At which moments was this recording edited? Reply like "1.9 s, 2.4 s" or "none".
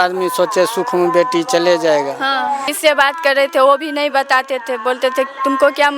2.6 s

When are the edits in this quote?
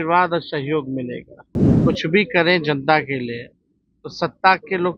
1.7 s

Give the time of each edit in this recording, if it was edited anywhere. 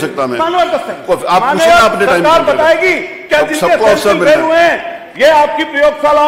none

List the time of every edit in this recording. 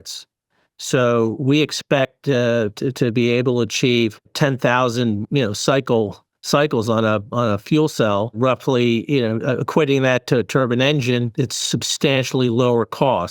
4.3 s, 8.4 s

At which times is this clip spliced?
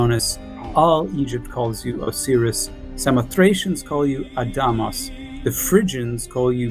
none

